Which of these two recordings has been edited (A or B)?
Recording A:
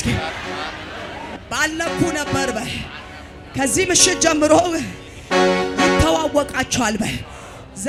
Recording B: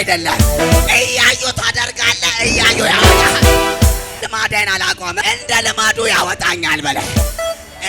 B